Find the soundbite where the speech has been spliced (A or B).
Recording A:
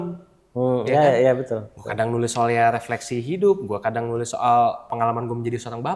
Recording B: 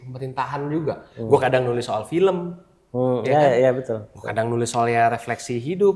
A